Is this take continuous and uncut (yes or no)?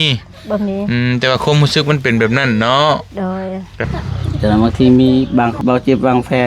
no